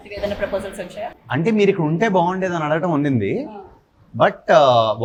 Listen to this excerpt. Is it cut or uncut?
uncut